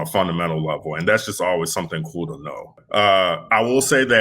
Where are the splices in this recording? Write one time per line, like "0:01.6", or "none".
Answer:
0:02.8